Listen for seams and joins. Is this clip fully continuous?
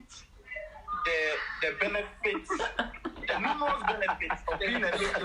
yes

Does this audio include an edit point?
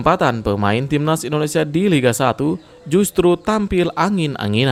no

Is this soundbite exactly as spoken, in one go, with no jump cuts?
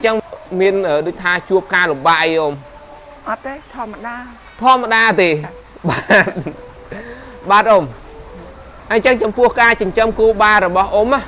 no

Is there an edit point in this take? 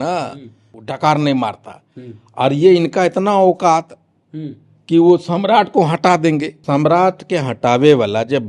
yes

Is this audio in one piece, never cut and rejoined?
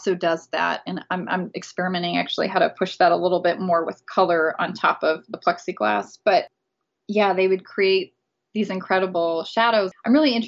yes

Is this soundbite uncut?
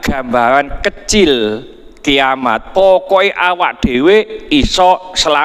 yes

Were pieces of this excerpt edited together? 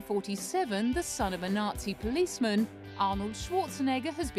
no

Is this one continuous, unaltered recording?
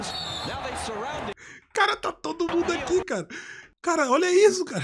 no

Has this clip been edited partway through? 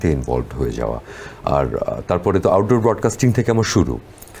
no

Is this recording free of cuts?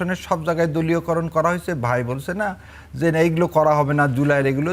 yes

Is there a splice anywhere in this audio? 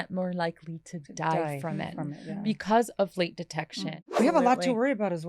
yes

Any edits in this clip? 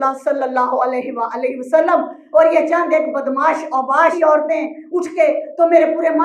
yes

